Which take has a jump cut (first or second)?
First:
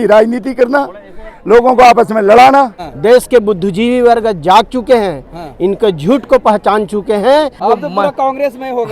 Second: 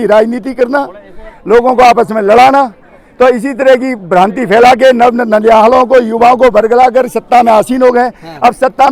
first